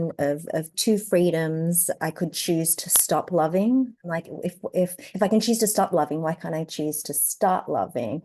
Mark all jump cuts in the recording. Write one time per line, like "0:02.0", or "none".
0:02.0
0:04.0